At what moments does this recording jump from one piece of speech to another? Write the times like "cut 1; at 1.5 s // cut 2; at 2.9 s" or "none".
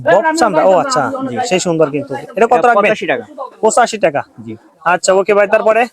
none